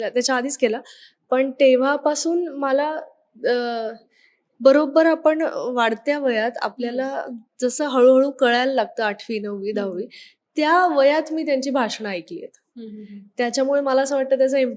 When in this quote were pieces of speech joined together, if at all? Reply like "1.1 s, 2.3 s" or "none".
none

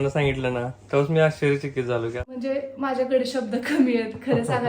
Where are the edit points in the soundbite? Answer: 2.2 s

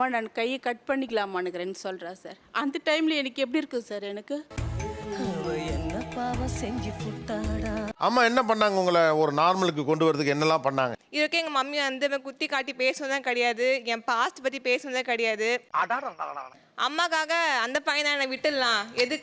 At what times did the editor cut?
none

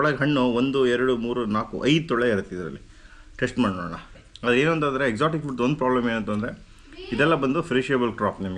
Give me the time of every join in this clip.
4.2 s

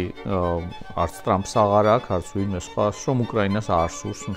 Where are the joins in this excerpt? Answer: none

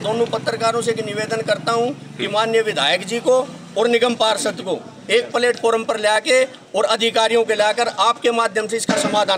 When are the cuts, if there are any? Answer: none

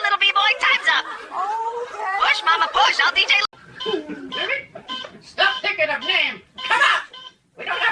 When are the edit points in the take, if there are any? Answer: none

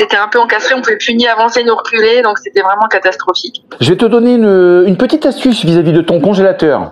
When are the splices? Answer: 3.6 s

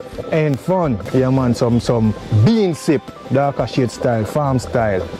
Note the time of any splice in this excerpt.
1.0 s

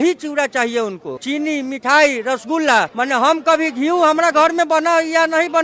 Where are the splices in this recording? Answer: 1.1 s

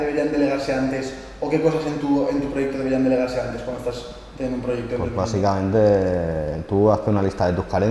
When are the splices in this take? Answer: none

